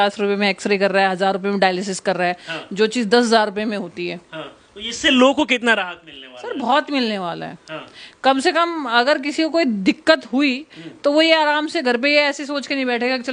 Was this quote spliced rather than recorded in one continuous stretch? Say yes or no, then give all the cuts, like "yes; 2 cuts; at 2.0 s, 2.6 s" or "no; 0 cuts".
no; 0 cuts